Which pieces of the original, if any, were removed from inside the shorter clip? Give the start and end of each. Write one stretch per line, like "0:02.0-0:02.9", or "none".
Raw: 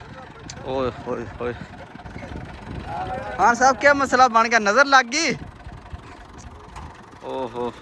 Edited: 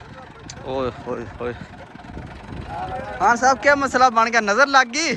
0:02.0-0:02.2